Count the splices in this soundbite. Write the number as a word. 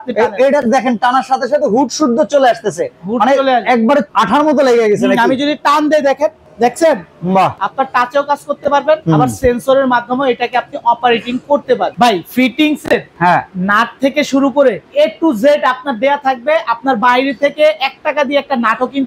seven